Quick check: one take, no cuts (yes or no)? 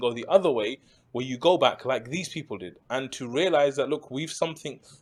yes